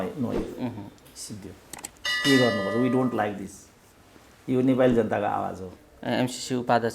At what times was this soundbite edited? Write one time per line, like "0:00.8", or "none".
0:05.7